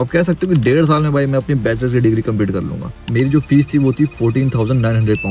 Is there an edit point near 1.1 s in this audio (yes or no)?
no